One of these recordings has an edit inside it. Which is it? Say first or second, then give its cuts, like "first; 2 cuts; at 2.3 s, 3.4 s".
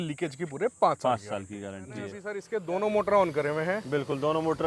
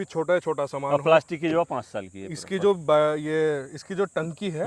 first; 1 cut; at 2.4 s